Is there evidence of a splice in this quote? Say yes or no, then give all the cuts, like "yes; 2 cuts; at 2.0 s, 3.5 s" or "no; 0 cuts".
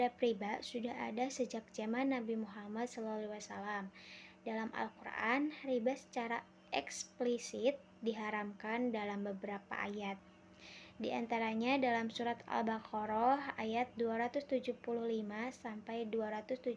yes; 1 cut; at 10.3 s